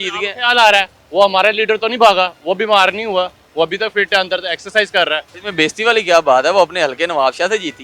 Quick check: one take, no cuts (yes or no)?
no